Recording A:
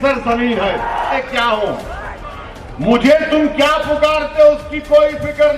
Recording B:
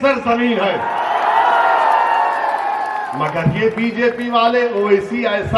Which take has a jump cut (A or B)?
A